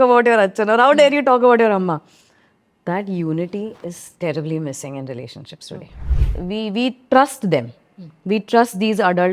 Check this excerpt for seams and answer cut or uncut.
cut